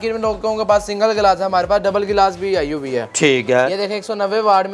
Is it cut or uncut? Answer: uncut